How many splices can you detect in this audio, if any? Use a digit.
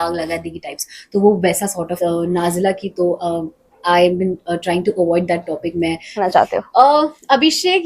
2